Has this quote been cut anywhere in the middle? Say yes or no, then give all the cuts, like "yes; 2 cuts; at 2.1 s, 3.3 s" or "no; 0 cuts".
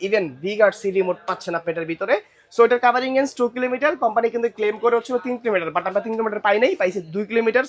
no; 0 cuts